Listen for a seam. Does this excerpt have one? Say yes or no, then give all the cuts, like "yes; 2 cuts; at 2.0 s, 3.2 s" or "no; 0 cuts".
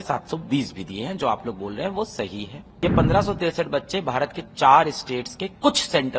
yes; 1 cut; at 2.6 s